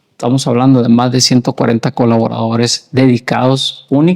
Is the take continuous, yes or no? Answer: yes